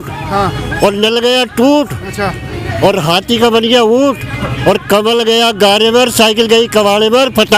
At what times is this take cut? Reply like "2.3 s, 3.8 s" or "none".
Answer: none